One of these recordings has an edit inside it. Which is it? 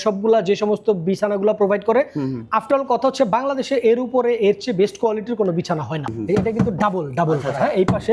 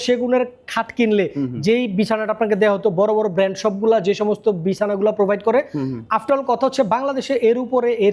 first; 1 cut; at 6.0 s

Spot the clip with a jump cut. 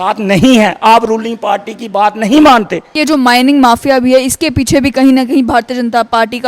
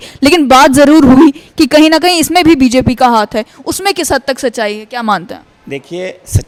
first; 1 cut; at 2.9 s

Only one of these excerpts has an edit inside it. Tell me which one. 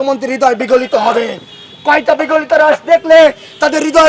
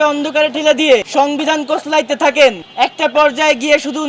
second; 2 cuts; at 1.1 s, 2.6 s

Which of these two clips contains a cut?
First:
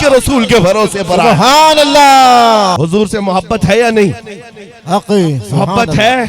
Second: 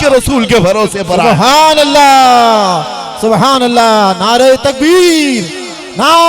first; 1 cut; at 2.8 s

